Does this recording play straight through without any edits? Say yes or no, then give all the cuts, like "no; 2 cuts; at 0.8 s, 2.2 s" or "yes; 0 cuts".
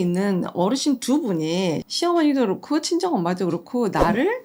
yes; 0 cuts